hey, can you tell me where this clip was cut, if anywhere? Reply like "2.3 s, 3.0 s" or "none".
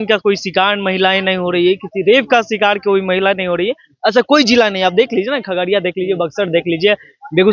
none

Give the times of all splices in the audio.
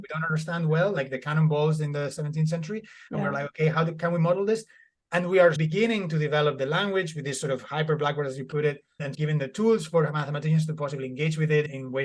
5.6 s, 9.1 s

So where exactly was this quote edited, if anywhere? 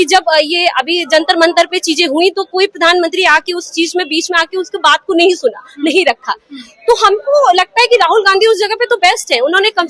none

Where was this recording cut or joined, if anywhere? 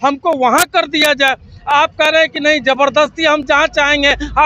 none

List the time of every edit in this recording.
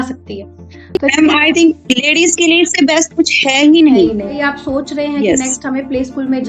4.4 s

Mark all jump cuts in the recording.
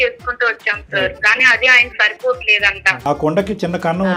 3.0 s

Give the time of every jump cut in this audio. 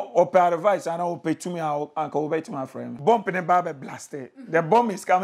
2.9 s

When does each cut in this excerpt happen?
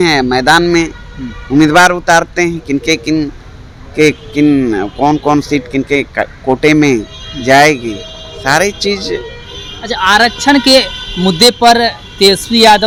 none

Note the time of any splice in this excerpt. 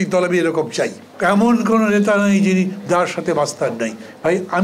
1.0 s

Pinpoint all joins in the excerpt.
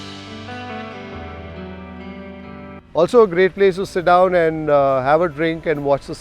2.7 s

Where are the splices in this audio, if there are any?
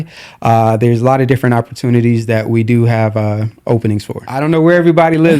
4.3 s

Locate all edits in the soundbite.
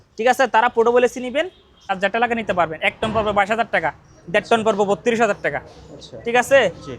2.0 s

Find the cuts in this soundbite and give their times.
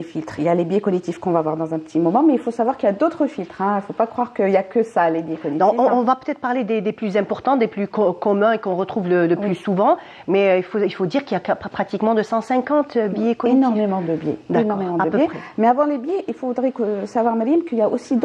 none

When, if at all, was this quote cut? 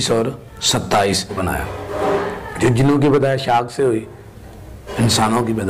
1.4 s

